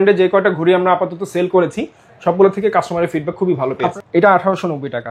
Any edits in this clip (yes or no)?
yes